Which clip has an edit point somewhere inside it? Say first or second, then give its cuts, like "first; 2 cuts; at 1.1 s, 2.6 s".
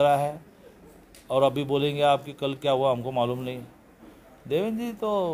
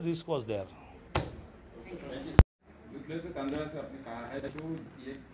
second; 1 cut; at 2.5 s